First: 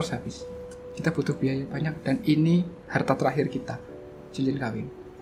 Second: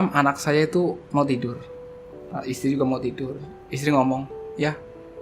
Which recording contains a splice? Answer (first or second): second